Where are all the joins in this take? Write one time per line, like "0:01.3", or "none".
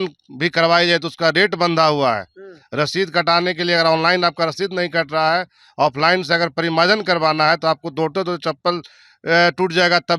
none